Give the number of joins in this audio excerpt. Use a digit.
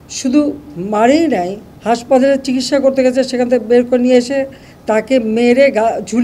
0